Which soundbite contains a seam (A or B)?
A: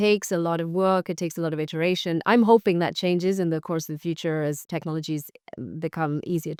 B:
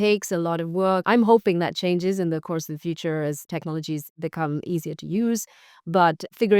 B